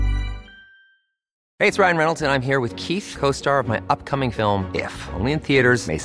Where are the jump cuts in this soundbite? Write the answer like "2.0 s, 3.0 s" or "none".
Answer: 1.4 s